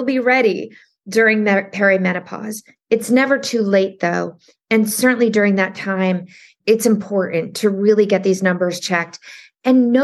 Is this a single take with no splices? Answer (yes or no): no